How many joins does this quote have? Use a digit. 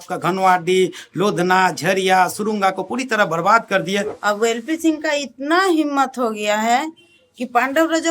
1